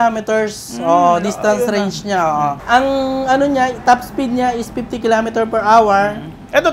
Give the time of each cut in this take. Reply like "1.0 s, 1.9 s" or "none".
2.6 s